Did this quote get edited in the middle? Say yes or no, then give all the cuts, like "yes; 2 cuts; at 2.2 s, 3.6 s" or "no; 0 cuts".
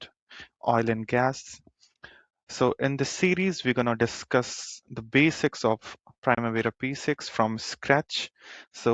no; 0 cuts